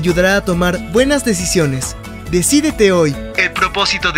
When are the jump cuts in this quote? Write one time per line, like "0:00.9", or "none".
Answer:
0:01.9